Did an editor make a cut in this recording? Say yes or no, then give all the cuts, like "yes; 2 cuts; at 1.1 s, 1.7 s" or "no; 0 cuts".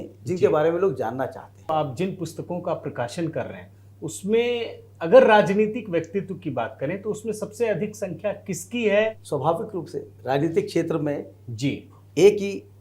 yes; 2 cuts; at 1.7 s, 9.2 s